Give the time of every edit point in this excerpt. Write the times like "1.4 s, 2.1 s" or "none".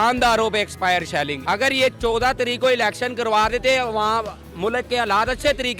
1.4 s, 4.4 s